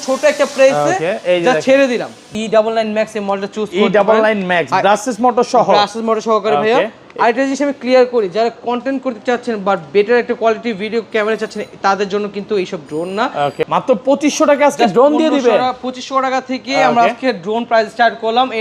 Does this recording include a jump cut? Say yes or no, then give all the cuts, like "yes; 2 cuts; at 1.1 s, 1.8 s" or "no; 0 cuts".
yes; 2 cuts; at 2.2 s, 13.6 s